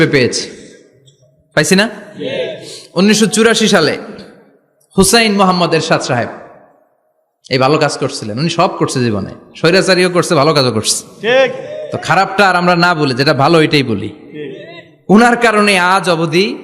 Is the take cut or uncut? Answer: uncut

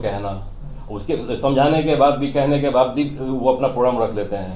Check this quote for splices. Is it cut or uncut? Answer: uncut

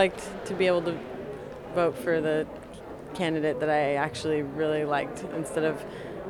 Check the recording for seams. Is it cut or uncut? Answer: uncut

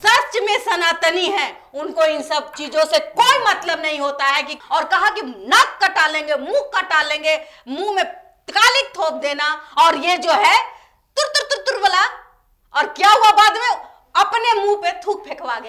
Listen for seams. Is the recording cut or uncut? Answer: cut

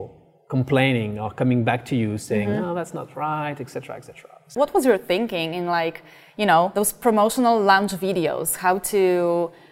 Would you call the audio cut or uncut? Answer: cut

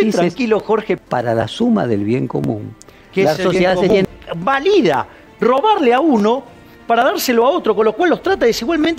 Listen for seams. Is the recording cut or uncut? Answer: uncut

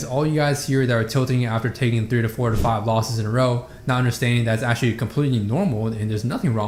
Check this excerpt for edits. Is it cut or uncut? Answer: uncut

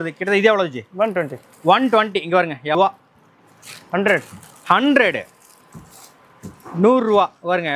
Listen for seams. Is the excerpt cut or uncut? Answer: cut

